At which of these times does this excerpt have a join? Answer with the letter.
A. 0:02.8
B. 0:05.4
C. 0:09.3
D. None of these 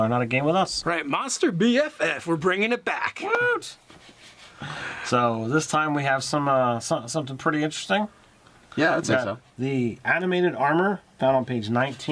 B